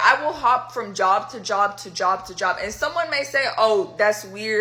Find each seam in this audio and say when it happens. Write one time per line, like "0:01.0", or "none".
none